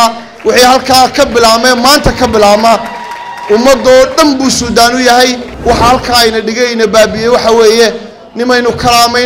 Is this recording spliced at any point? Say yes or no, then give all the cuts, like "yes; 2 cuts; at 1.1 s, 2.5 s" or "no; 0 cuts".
yes; 1 cut; at 5.5 s